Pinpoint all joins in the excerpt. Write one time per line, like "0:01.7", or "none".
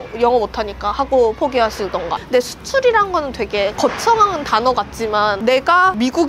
0:02.1